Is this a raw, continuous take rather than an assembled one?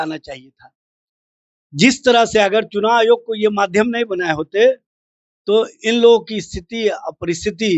yes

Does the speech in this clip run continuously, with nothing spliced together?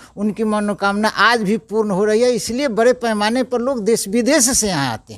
yes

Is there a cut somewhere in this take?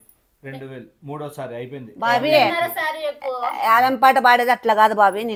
no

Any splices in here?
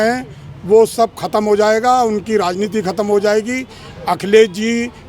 no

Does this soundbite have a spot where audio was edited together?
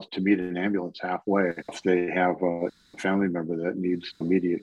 no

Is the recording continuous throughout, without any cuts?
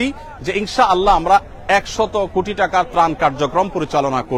yes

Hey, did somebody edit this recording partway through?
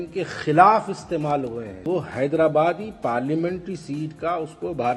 yes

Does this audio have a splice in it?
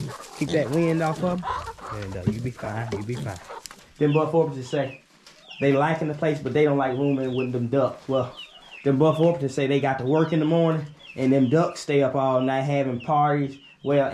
yes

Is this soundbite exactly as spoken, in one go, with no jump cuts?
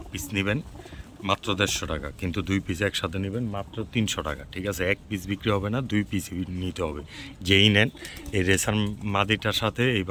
yes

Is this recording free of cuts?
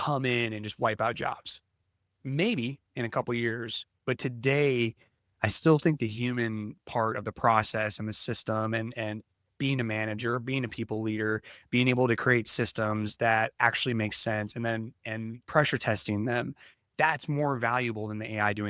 yes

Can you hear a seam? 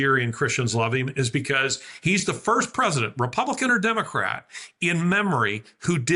no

